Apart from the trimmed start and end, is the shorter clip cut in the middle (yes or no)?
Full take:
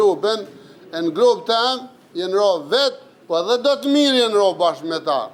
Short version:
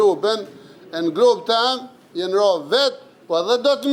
no